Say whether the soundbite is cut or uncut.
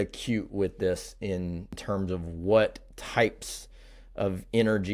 uncut